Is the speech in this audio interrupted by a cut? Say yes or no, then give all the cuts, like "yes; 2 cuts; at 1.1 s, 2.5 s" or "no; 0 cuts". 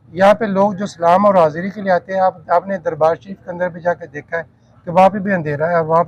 no; 0 cuts